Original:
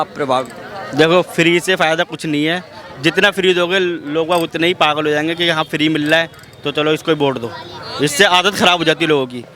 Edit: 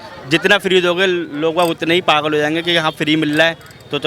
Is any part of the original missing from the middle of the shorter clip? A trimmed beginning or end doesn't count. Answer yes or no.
no